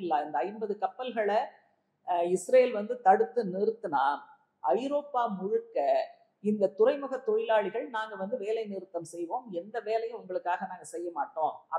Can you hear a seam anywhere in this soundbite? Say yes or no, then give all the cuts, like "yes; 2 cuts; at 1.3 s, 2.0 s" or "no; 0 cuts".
no; 0 cuts